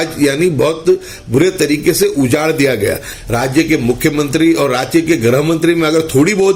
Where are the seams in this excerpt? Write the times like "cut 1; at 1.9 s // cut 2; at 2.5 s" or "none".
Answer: cut 1; at 3.1 s